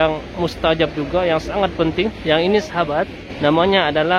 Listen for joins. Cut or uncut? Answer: cut